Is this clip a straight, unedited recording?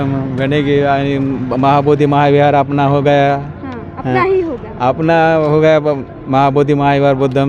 yes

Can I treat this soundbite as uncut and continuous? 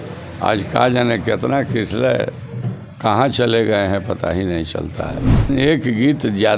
no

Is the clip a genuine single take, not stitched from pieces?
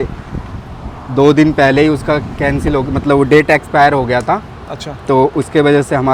yes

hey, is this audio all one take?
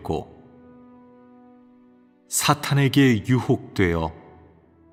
yes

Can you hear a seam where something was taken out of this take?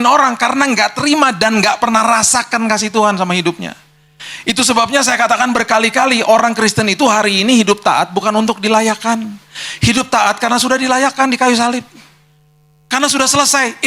yes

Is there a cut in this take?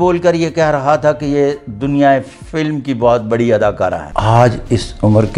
yes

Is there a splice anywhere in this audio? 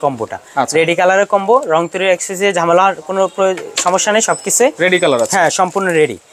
no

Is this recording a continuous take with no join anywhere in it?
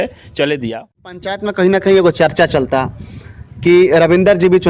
no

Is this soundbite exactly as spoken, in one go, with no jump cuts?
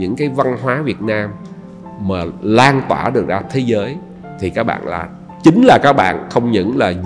yes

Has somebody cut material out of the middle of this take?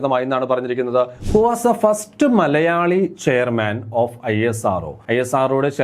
yes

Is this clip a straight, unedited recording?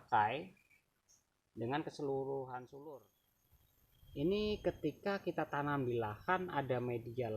no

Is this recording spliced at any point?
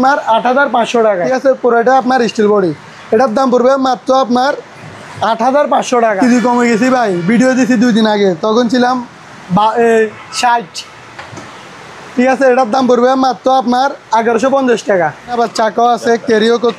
yes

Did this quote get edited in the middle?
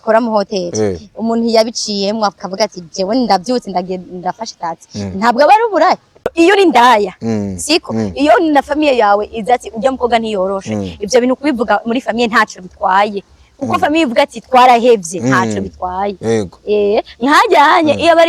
yes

